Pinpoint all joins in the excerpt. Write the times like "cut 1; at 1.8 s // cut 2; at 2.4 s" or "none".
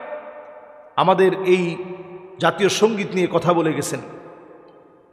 none